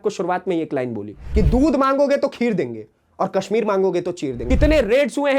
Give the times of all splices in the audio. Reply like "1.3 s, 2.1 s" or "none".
1.1 s, 4.3 s